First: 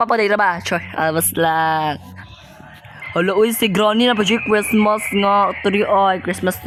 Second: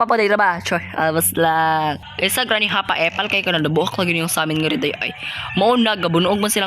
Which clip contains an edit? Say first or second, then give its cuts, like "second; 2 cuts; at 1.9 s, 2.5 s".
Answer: second; 1 cut; at 2.1 s